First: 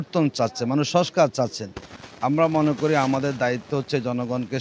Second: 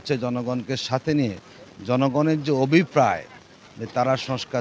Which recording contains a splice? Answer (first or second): first